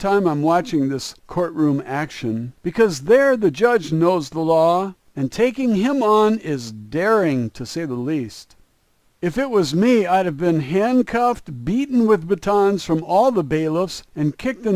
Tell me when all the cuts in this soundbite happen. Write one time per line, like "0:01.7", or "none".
none